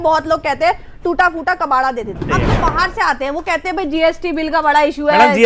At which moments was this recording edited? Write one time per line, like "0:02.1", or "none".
0:02.2